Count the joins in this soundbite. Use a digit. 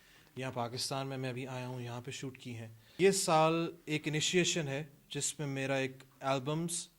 1